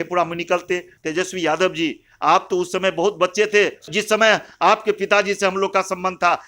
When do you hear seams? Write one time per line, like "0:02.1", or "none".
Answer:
0:00.9
0:03.9